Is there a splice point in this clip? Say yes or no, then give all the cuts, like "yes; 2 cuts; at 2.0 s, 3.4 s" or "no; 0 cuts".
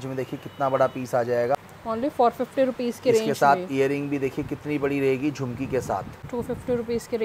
yes; 2 cuts; at 1.6 s, 6.2 s